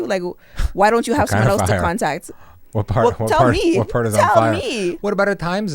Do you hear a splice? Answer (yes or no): no